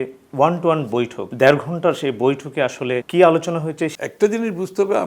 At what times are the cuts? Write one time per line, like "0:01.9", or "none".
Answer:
0:01.2
0:03.1
0:03.9

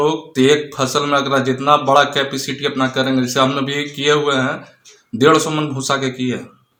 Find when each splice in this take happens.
none

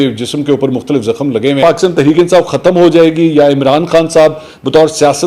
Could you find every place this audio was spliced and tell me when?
0:01.6

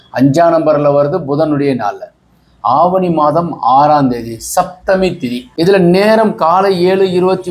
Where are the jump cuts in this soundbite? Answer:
0:05.4

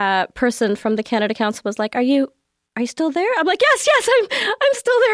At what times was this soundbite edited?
none

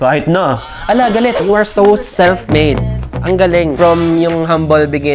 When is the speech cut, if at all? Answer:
0:01.4

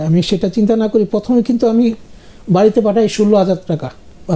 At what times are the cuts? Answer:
none

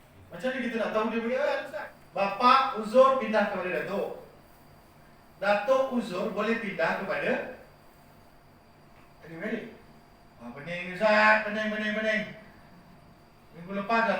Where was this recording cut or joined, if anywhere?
0:01.6

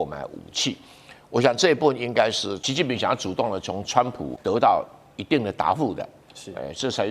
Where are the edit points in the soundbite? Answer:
0:02.6
0:04.3

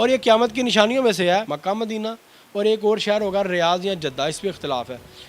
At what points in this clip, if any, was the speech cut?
0:01.5

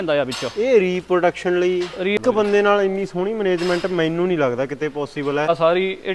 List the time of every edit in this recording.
0:02.2
0:05.5

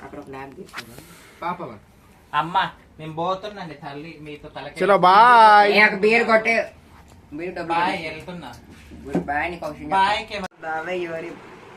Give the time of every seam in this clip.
0:10.5

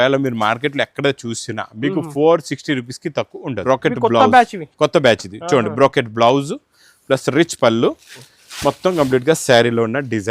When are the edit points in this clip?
0:03.6

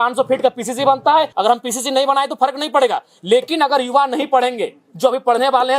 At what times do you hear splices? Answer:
0:01.3

